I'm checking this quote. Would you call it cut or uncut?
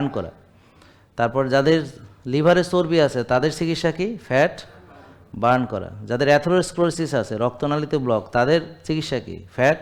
uncut